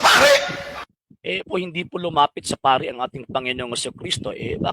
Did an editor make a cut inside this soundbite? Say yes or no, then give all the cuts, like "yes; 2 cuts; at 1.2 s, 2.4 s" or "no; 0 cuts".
yes; 1 cut; at 1.5 s